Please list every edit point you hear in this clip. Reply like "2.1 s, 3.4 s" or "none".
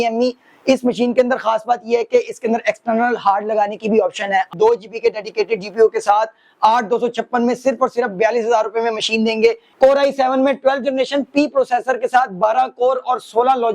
4.5 s, 9.7 s